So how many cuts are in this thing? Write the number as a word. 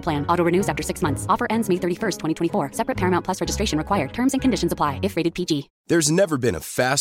one